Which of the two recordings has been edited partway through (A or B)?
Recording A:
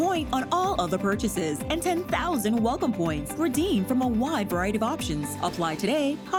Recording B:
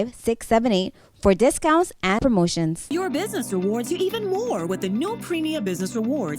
B